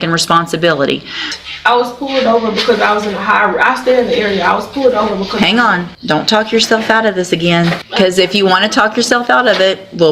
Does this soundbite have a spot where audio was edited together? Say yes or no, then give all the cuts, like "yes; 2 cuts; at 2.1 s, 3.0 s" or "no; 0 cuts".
yes; 3 cuts; at 1.3 s, 5.9 s, 7.8 s